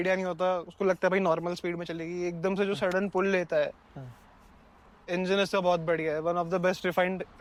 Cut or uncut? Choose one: uncut